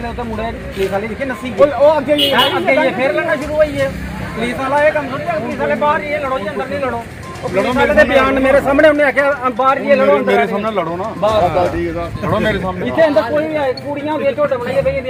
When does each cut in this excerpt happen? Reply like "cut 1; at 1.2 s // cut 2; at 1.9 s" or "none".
none